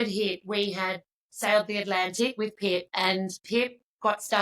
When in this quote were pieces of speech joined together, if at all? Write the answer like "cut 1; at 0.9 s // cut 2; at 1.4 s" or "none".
cut 1; at 3.4 s